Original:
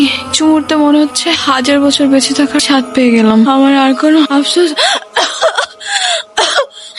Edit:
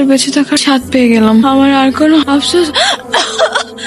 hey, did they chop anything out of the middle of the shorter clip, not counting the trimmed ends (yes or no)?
no